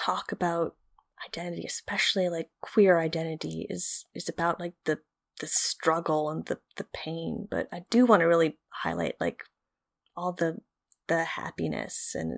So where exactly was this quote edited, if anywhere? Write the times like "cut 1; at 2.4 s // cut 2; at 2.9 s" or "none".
none